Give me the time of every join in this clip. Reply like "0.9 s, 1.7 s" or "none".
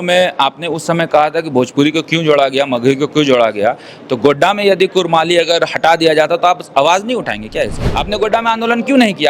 7.8 s